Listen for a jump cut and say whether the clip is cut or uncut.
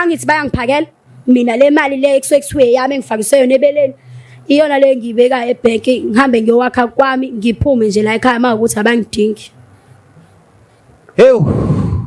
uncut